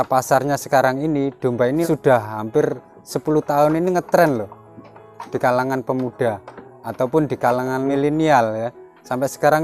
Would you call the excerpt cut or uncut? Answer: cut